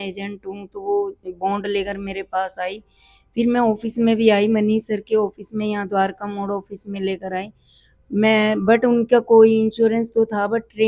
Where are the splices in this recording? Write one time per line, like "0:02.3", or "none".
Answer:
none